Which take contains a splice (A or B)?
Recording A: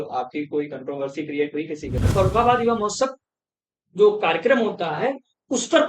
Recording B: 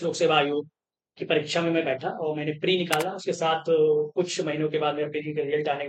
A